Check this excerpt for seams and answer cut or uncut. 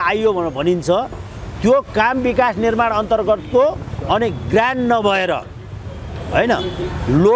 uncut